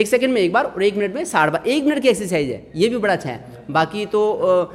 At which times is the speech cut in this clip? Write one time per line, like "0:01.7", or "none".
none